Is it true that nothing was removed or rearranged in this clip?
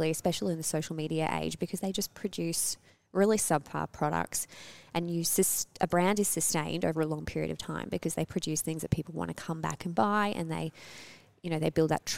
yes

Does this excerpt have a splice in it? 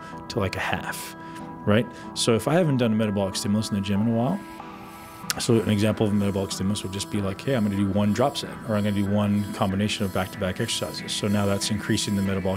no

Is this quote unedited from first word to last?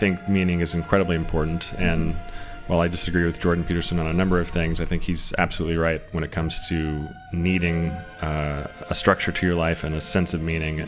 yes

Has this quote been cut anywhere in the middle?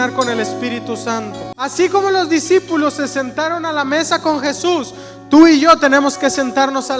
yes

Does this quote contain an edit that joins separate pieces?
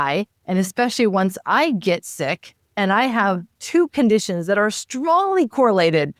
no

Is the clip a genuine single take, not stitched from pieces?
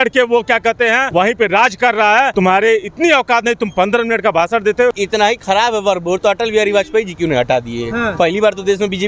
no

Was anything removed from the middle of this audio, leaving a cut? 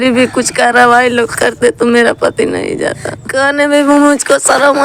yes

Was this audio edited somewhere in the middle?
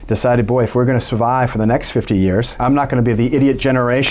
yes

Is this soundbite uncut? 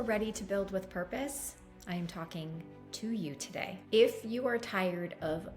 no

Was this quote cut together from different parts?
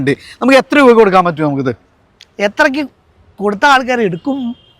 no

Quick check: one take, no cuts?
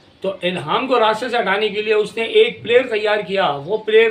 yes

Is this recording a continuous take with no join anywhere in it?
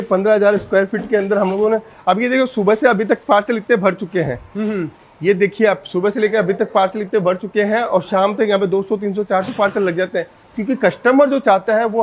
yes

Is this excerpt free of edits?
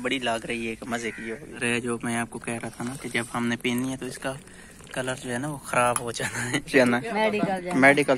no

